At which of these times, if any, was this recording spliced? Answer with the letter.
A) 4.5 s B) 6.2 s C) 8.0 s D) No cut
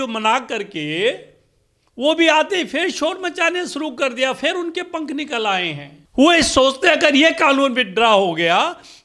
D